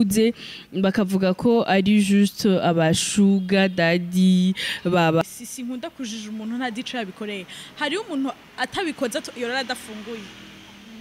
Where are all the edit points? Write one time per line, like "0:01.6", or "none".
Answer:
0:05.2